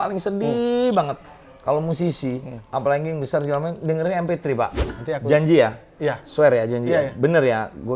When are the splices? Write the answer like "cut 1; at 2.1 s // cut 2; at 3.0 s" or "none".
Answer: cut 1; at 4.9 s